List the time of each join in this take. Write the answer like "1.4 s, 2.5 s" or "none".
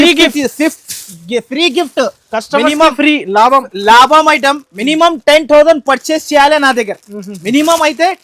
none